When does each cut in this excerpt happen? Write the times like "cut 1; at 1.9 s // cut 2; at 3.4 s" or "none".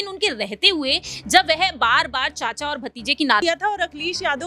cut 1; at 3.4 s

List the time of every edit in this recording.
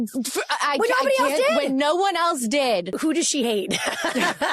cut 1; at 3.0 s

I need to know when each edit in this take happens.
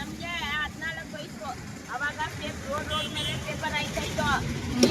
none

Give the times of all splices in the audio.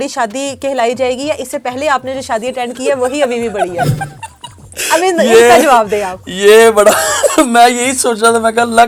none

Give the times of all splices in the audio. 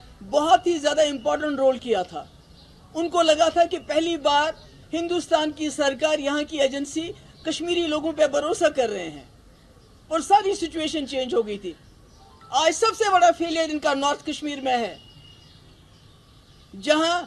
none

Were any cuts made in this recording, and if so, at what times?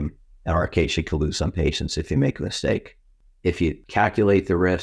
cut 1; at 3.6 s

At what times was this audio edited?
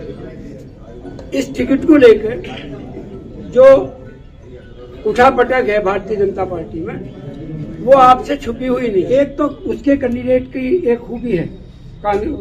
cut 1; at 9.1 s

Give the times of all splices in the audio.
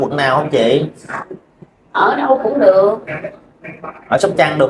none

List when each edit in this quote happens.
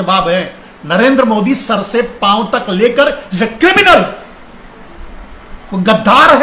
none

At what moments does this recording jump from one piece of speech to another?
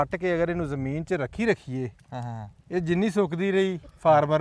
none

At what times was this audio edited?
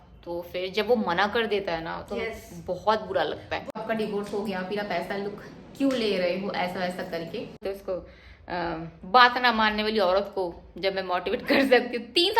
cut 1; at 3.7 s // cut 2; at 7.6 s

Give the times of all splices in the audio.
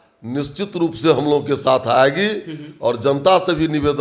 none

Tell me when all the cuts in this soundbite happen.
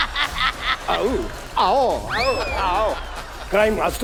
none

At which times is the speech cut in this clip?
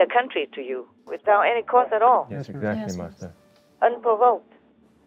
cut 1; at 1.0 s

